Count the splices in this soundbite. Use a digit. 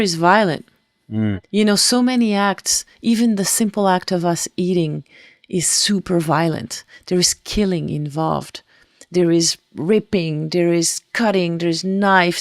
1